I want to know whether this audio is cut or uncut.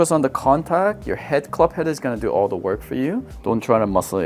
cut